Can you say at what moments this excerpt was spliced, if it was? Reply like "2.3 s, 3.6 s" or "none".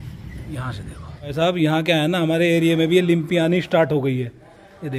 1.3 s

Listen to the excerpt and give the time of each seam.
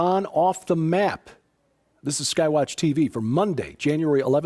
2.7 s

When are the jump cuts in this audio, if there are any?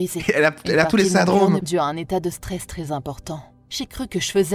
1.6 s

